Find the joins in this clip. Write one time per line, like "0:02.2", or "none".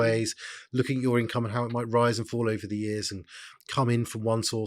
none